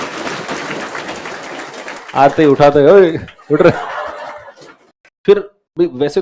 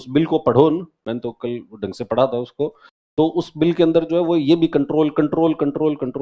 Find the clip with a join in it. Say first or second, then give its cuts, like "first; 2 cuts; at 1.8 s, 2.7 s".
first; 1 cut; at 5.0 s